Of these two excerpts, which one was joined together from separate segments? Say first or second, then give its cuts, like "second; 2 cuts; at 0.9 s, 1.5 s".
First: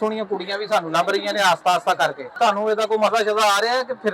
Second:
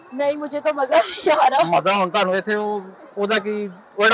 first; 1 cut; at 2.4 s